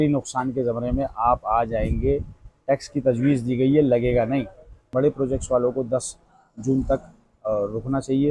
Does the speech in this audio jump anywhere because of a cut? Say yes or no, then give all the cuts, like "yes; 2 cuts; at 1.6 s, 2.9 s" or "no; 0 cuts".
yes; 1 cut; at 5.0 s